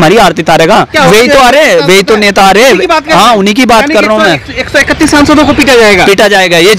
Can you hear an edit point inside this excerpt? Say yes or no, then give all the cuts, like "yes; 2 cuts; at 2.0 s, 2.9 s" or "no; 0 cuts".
yes; 1 cut; at 0.9 s